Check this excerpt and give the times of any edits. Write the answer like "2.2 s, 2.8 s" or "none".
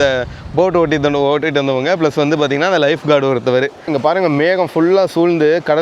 3.9 s